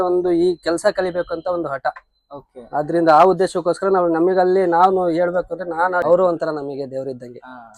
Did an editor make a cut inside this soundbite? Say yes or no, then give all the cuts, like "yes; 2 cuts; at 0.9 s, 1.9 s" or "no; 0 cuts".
yes; 1 cut; at 6.0 s